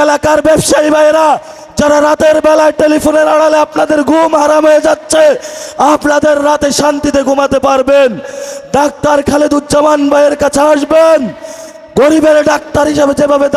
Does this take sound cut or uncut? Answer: uncut